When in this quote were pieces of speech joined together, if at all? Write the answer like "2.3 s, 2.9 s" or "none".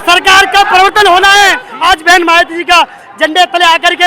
1.7 s

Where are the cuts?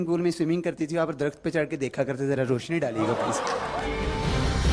3.7 s

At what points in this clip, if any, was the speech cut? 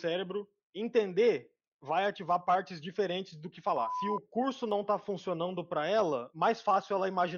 3.9 s, 6.3 s

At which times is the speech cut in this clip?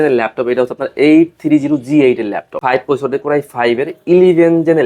2.6 s

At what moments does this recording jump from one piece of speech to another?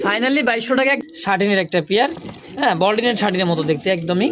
1.0 s

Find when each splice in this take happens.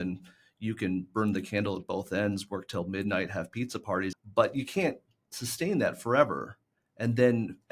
4.1 s

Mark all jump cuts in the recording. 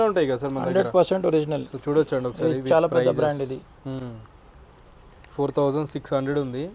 none

